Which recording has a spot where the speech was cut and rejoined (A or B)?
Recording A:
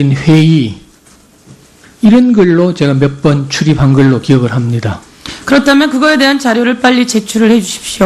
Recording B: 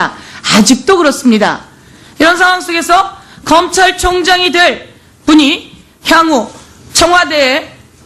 B